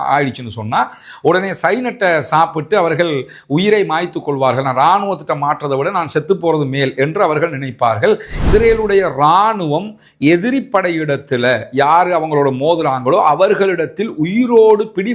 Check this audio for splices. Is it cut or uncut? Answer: cut